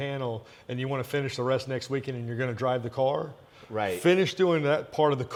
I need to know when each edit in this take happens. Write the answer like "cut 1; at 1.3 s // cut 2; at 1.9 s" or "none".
none